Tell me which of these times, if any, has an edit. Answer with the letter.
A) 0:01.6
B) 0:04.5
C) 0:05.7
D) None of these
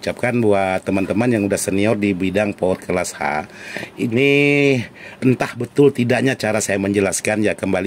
D